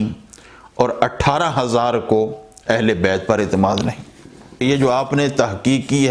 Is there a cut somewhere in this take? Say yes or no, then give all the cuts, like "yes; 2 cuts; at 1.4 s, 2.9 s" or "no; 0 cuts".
yes; 1 cut; at 4.6 s